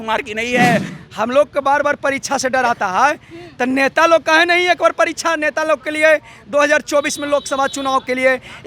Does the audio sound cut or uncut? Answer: cut